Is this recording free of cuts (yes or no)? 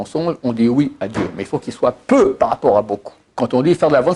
no